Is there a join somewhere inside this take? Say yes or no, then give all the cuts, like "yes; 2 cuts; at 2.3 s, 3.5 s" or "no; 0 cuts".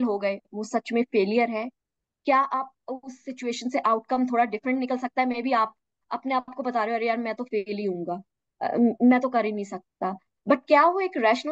no; 0 cuts